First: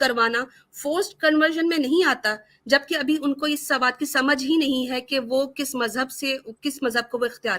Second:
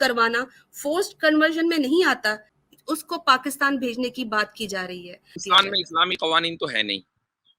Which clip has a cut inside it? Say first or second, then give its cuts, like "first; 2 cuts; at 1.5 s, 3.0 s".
second; 2 cuts; at 2.5 s, 5.4 s